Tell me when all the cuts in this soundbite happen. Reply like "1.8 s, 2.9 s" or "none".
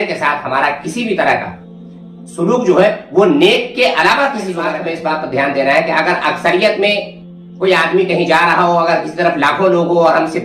4.6 s